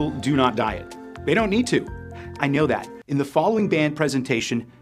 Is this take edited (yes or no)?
yes